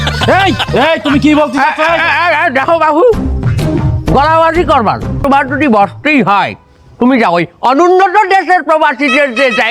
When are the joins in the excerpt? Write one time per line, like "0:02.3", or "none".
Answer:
0:05.2